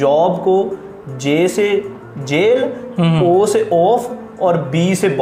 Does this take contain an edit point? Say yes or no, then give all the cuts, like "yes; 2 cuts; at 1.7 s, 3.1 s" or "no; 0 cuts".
no; 0 cuts